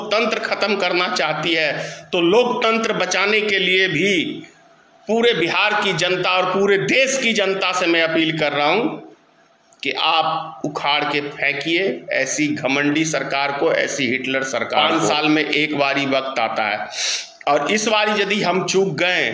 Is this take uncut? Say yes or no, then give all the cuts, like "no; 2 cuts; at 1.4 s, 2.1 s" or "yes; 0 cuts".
no; 1 cut; at 14.7 s